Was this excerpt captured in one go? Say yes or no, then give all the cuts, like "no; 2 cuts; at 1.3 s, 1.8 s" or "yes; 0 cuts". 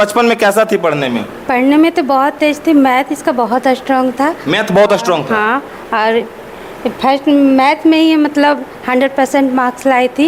yes; 0 cuts